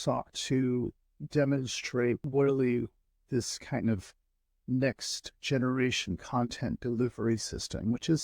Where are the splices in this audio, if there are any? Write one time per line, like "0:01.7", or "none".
0:02.2